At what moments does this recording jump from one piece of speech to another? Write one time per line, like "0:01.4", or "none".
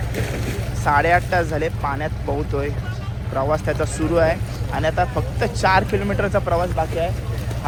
none